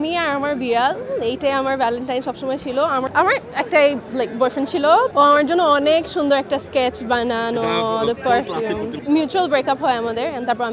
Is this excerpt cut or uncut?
cut